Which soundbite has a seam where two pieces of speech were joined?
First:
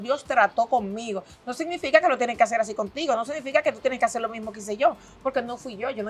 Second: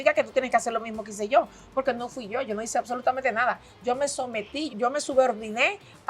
second; 1 cut; at 4.7 s

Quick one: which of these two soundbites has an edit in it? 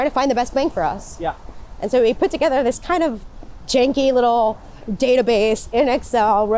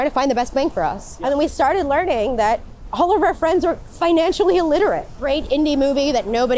second; 3 cuts; at 1.1 s, 2.8 s, 5.1 s

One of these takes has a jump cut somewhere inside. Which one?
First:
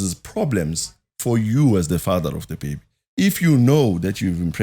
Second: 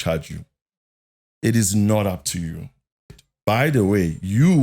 second; 1 cut; at 3.2 s

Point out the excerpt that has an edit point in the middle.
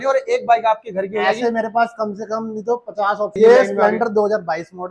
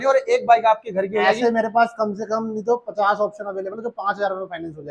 first; 1 cut; at 3.3 s

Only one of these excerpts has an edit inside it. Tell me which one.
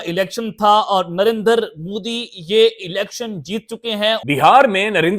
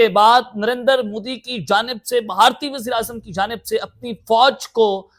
first; 1 cut; at 4.2 s

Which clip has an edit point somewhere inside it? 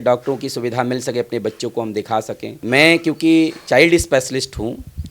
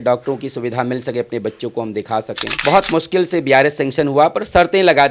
second; 1 cut; at 2.6 s

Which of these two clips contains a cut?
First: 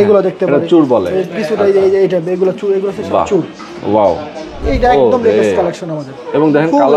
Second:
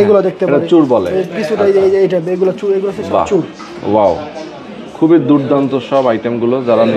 first; 1 cut; at 4.6 s

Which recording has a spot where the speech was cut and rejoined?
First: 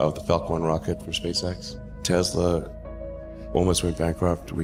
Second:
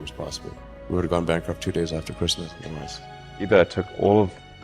second; 1 cut; at 3.2 s

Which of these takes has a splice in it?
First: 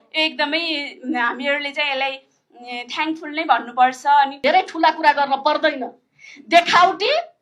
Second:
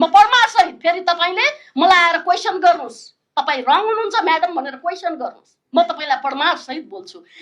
first; 1 cut; at 4.3 s

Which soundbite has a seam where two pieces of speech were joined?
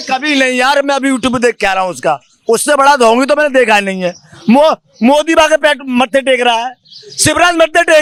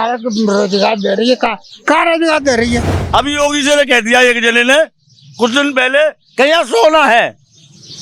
second; 1 cut; at 3.0 s

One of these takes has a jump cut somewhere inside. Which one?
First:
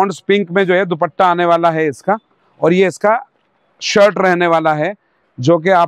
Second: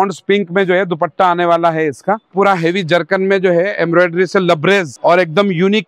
second; 2 cuts; at 2.3 s, 4.9 s

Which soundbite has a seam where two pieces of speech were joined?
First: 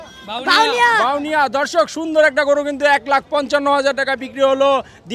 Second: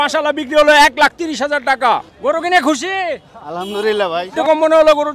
second; 2 cuts; at 2.1 s, 4.4 s

